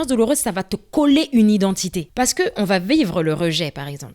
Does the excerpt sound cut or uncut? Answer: cut